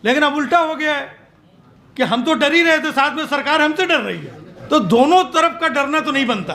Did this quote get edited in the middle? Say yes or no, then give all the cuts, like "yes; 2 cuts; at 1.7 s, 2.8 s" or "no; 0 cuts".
no; 0 cuts